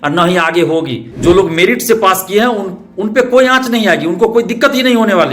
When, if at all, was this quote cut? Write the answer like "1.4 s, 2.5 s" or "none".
1.1 s